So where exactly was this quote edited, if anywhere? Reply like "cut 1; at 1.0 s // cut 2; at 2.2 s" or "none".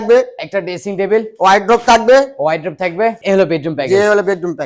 cut 1; at 3.2 s